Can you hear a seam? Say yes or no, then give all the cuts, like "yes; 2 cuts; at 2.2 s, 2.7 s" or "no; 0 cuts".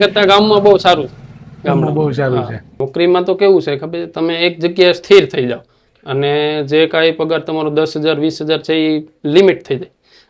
yes; 1 cut; at 2.8 s